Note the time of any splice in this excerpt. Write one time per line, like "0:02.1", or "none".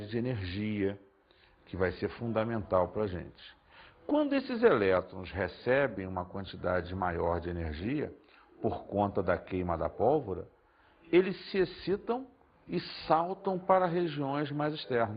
none